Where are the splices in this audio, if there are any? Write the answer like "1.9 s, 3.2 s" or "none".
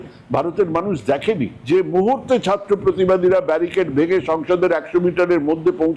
none